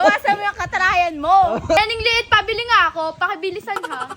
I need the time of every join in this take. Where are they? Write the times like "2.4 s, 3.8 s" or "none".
1.8 s